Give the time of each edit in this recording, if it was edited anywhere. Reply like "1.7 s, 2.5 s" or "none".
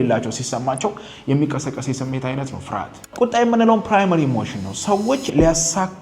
3.0 s